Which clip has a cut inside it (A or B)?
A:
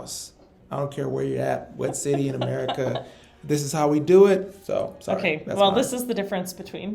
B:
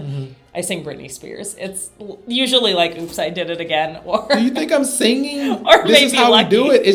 A